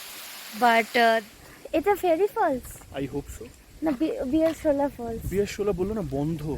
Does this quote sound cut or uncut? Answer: cut